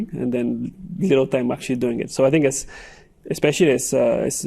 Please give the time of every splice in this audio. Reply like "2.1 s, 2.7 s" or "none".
none